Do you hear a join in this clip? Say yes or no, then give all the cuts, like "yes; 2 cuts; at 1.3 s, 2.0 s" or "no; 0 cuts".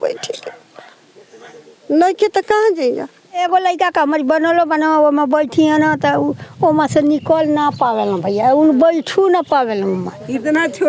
yes; 1 cut; at 3.4 s